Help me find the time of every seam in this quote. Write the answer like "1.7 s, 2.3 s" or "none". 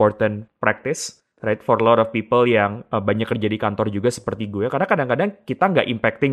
none